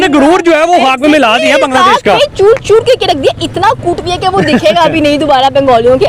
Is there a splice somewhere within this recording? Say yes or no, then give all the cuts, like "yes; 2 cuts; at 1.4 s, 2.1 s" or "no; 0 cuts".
no; 0 cuts